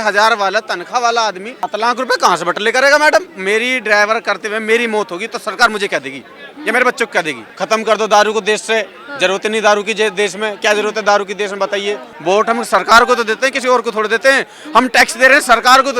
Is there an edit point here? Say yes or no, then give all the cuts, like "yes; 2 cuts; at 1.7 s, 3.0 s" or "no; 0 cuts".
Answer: yes; 4 cuts; at 1.7 s, 3.3 s, 7.4 s, 12.1 s